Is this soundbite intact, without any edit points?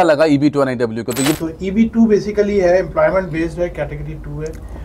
no; 1 cut; at 1.3 s

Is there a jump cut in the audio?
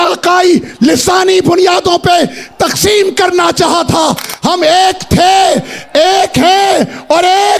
no; 0 cuts

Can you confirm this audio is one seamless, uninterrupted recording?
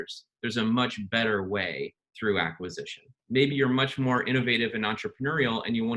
no; 1 cut; at 3.1 s

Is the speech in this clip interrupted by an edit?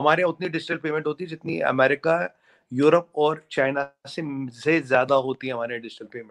no; 0 cuts

